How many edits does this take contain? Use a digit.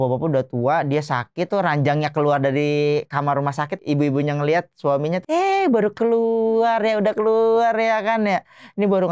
3